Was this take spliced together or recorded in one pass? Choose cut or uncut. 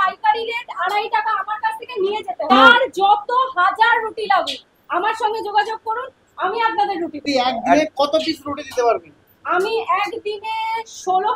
cut